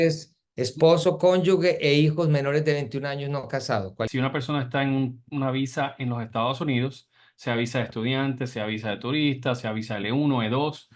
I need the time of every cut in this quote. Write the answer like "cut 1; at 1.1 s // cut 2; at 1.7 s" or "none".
cut 1; at 4.1 s